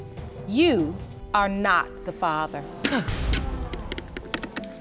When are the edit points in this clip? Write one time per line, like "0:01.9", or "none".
0:01.1